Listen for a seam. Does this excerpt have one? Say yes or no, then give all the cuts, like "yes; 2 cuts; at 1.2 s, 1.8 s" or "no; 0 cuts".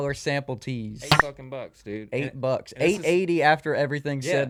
no; 0 cuts